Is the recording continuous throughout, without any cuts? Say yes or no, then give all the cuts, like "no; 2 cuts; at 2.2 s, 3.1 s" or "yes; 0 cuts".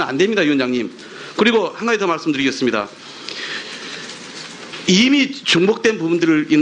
no; 1 cut; at 4.8 s